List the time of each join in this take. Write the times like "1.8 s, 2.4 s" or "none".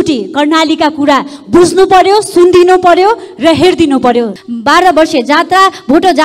4.3 s